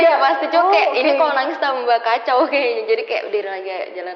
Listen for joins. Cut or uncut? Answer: uncut